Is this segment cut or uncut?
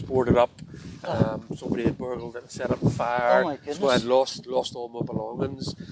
uncut